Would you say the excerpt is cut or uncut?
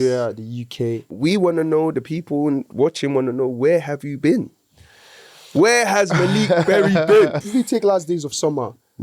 cut